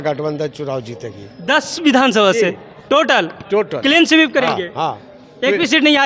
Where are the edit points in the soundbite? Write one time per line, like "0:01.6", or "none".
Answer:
none